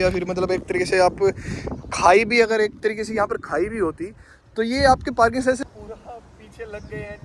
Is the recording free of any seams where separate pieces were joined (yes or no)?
no